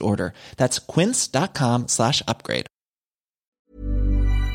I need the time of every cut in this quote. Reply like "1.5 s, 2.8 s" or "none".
3.6 s